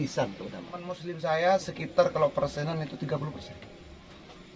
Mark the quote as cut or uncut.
cut